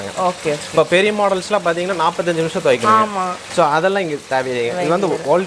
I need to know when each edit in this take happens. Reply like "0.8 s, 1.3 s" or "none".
none